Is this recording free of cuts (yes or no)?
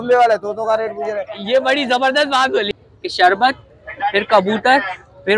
no